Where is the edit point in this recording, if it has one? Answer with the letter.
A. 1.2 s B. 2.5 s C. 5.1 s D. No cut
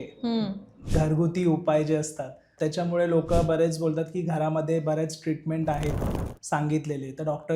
B